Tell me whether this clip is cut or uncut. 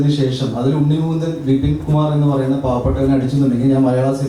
uncut